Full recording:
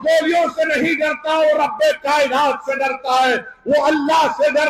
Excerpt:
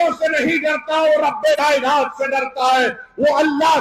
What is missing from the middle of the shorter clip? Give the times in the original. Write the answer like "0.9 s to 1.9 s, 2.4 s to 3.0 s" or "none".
2.0 s to 2.1 s